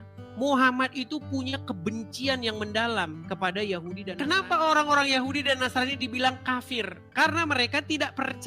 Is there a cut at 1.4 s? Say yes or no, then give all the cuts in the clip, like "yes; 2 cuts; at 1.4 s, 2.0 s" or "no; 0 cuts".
no; 1 cut; at 4.0 s